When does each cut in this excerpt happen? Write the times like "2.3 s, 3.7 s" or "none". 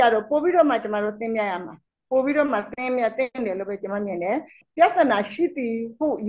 4.6 s